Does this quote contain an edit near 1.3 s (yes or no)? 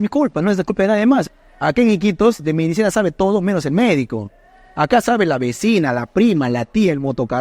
yes